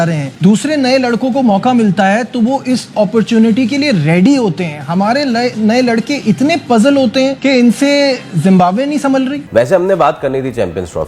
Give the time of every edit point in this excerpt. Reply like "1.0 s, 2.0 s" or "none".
none

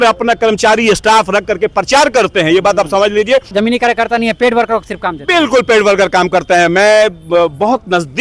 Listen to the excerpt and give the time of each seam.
3.5 s

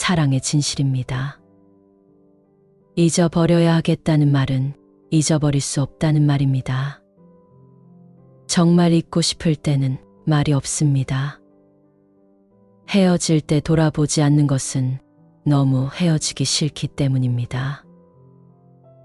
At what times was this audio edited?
none

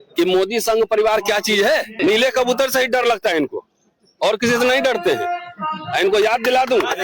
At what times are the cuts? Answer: 1.9 s

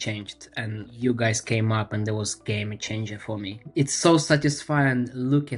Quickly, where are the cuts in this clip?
0.9 s, 3.6 s

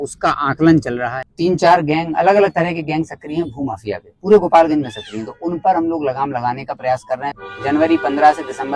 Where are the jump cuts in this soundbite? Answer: 1.3 s, 7.5 s

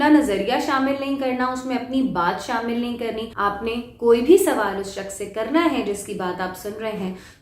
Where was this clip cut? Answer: 3.3 s

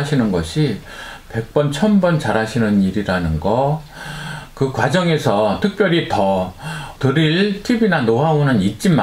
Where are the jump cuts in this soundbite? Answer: none

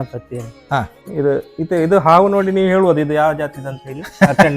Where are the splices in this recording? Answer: 1.0 s

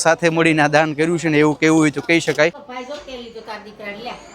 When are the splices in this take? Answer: 2.7 s

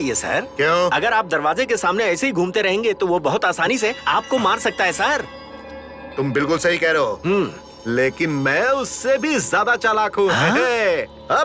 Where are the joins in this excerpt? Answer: none

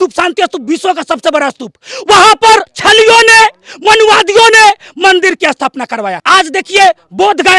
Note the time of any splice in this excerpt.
2.7 s, 6.2 s

